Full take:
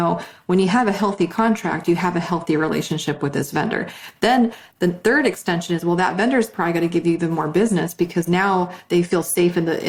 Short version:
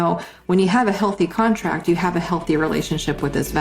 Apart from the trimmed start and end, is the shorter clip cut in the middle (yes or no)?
no